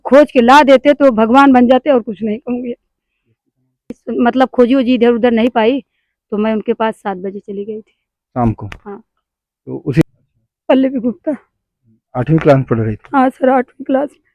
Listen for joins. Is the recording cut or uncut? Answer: cut